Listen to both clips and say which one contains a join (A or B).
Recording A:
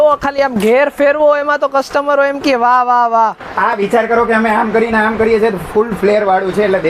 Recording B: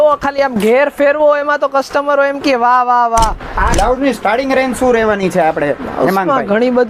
B